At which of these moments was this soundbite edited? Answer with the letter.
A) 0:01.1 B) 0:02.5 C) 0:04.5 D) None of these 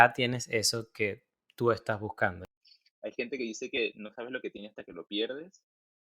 B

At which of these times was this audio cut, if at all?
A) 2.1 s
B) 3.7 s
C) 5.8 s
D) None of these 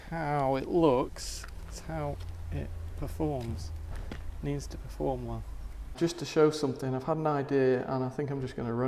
C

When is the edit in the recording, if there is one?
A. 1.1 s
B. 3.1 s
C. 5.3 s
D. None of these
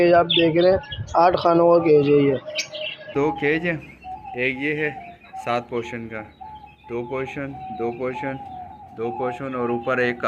B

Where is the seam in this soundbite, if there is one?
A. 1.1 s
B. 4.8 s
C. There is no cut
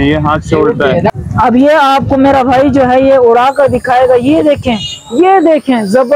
A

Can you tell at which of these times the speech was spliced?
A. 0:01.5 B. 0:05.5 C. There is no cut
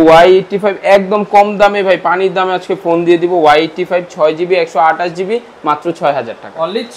C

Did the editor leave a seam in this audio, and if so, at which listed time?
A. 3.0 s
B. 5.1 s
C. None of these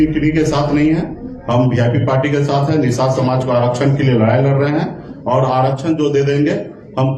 C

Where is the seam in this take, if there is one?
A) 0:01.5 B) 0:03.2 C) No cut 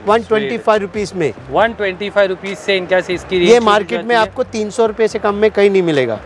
C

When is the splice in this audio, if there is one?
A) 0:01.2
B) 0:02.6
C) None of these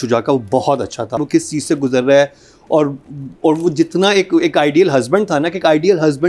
A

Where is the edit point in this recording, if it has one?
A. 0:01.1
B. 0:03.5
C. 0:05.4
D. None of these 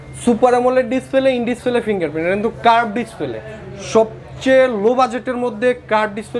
D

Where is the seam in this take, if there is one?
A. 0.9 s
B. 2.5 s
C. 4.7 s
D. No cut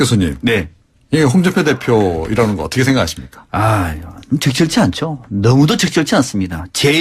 C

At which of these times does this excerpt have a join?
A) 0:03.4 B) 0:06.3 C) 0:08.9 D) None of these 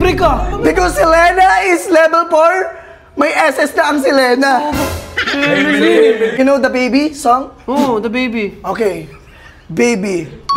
B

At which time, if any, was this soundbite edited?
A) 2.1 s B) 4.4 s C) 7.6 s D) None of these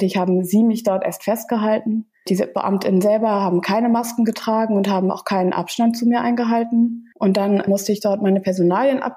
C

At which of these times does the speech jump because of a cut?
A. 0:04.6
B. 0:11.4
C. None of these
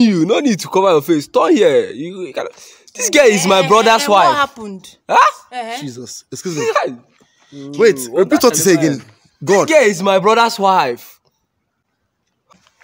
C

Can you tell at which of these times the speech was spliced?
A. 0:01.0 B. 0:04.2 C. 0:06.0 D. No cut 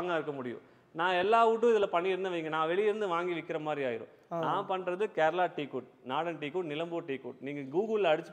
D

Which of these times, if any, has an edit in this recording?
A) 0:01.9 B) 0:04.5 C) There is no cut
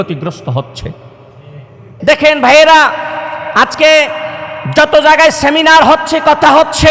A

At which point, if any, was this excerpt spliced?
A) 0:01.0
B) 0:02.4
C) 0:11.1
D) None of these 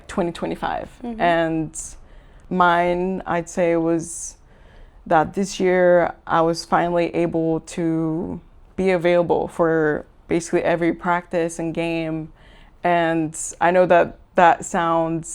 B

